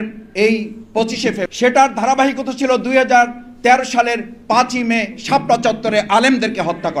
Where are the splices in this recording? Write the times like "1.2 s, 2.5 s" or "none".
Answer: 1.5 s